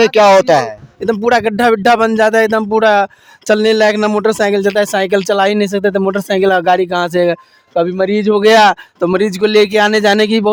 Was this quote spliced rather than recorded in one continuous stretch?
no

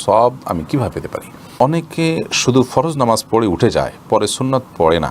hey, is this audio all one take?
no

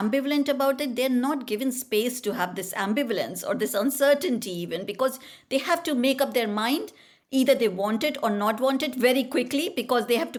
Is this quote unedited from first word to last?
yes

